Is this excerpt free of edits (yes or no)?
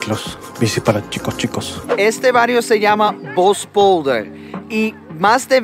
no